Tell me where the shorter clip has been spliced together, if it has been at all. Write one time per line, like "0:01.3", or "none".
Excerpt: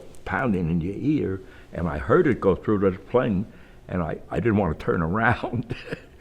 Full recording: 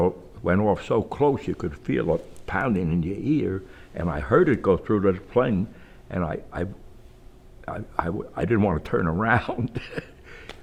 0:04.2